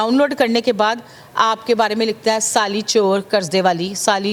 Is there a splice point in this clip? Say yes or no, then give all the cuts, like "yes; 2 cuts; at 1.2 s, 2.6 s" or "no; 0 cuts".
no; 0 cuts